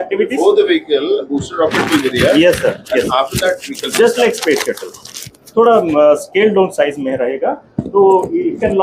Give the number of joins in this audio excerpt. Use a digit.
0